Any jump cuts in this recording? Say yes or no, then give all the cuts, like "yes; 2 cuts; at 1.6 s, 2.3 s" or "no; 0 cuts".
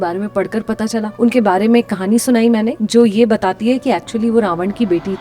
yes; 2 cuts; at 1.1 s, 2.8 s